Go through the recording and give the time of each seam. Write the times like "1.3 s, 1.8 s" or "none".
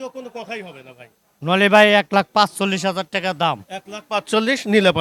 none